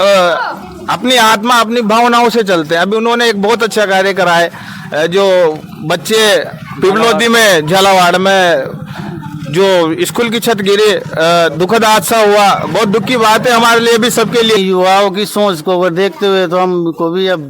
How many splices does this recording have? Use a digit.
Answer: 1